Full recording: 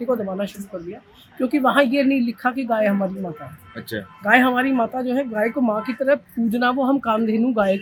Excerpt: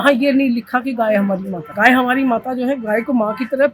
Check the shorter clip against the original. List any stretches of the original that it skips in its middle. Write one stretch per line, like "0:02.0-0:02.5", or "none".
0:03.3-0:04.1